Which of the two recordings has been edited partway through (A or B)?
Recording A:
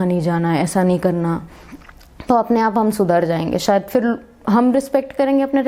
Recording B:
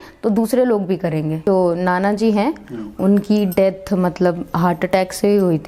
B